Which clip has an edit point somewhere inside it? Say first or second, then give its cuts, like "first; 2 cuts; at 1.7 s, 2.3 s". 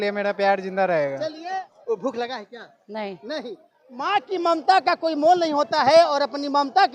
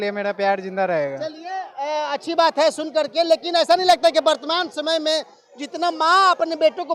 first; 1 cut; at 1.7 s